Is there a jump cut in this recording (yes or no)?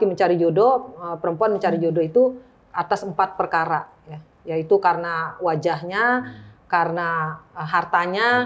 no